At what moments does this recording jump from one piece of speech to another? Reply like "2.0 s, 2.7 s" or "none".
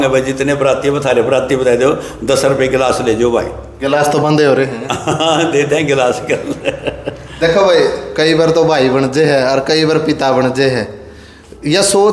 none